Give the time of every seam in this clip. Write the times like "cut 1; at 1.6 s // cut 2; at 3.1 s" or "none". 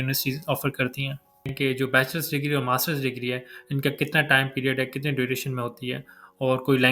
cut 1; at 1.5 s